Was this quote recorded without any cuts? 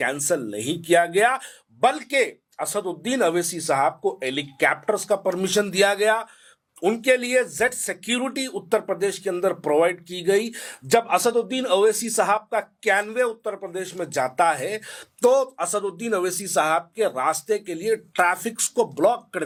yes; 0 cuts

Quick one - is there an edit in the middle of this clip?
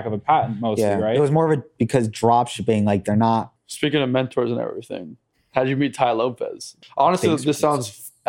yes; 2 cuts; at 3.6 s, 6.6 s

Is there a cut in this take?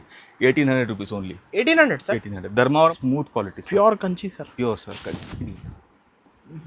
yes; 1 cut; at 3.0 s

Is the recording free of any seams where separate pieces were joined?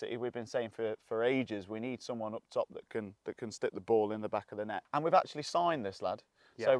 no; 1 cut; at 4.8 s

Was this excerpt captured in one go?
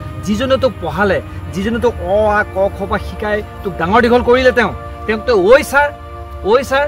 yes; 0 cuts

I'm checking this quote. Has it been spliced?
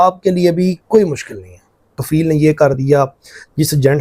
yes; 1 cut; at 2.0 s

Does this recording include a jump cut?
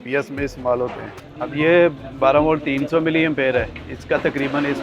yes; 1 cut; at 1.1 s

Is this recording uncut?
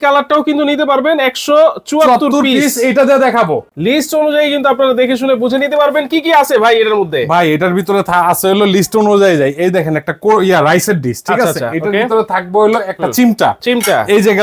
no; 1 cut; at 3.6 s

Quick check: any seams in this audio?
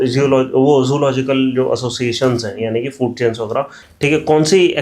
yes; 1 cut; at 3.8 s

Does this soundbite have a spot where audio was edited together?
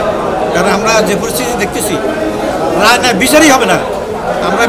no; 0 cuts

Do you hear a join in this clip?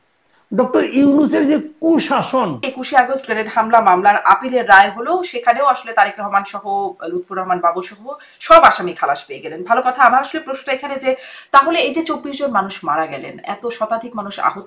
yes; 1 cut; at 2.7 s

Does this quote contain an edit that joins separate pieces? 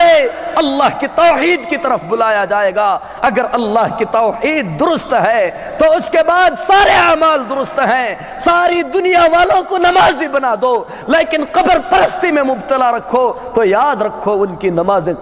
no; 0 cuts

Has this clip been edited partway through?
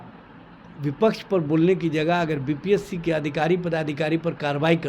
no; 0 cuts

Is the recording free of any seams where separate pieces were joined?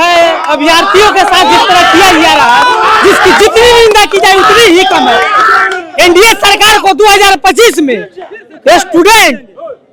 yes; 0 cuts

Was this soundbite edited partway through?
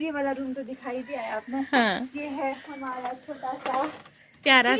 no; 0 cuts

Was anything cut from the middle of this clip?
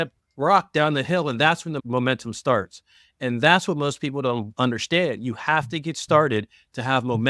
yes; 1 cut; at 1.8 s

